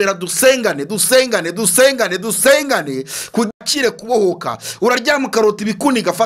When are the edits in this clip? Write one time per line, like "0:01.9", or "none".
0:03.6